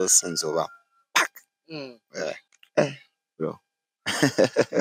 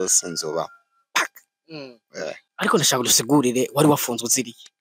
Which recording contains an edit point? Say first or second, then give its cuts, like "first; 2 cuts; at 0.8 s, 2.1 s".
first; 1 cut; at 2.4 s